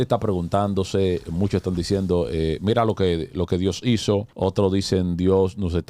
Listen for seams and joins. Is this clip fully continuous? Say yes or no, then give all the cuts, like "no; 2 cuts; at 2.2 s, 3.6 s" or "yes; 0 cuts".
no; 1 cut; at 4.3 s